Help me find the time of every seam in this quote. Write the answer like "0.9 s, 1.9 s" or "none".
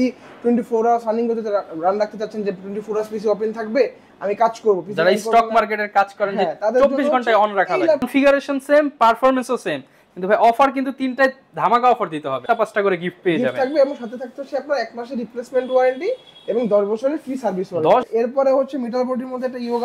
8.1 s, 12.4 s, 18.1 s

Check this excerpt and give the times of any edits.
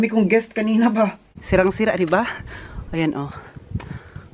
1.3 s

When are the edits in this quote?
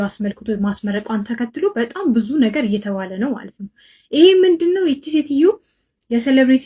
none

